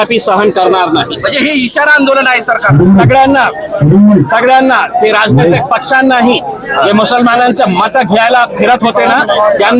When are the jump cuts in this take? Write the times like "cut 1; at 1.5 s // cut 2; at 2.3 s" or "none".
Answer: none

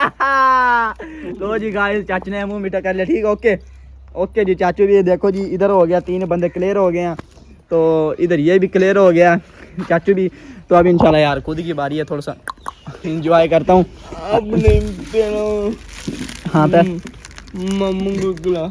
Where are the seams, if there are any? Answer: none

